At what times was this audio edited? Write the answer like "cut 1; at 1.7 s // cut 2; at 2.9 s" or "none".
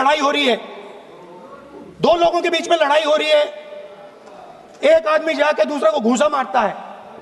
none